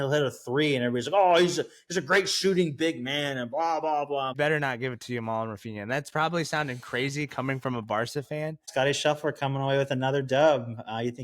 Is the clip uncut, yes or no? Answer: no